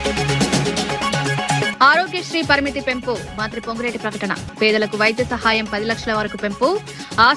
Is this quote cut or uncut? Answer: cut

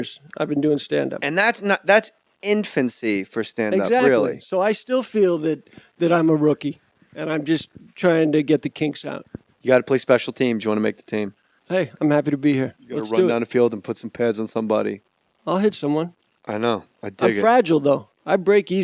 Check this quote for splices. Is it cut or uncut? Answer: cut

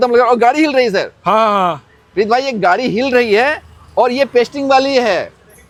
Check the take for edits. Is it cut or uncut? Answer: uncut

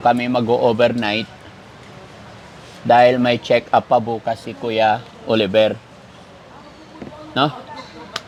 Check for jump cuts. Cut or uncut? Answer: uncut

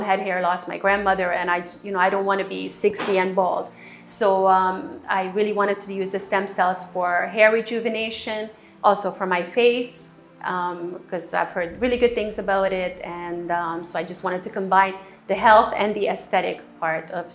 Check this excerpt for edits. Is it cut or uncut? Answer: uncut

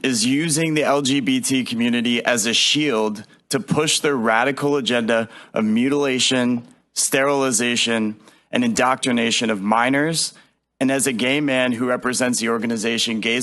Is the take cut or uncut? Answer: uncut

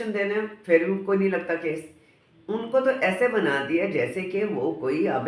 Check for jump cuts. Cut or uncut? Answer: uncut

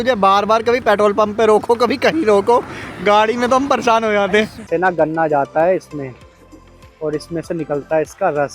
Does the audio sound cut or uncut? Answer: cut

